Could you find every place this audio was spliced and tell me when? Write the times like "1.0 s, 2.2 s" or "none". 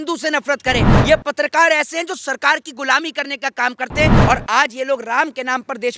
0.9 s, 4.2 s